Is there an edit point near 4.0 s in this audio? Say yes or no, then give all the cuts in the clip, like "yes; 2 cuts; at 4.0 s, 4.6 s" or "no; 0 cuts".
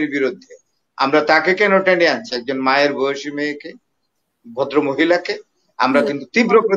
no; 0 cuts